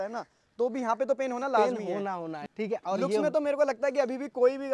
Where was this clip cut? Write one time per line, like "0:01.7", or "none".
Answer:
0:02.3